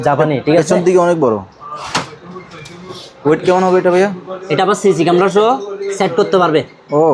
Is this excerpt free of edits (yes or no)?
yes